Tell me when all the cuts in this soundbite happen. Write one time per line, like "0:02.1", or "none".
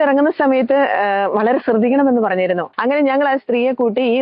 0:02.7